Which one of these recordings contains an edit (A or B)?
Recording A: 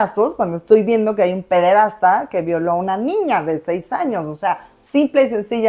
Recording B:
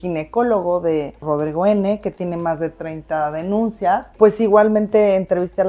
B